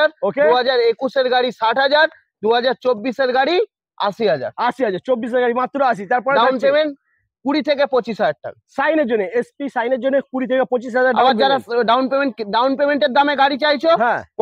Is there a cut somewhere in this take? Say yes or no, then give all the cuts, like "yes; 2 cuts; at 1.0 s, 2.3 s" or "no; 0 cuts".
no; 0 cuts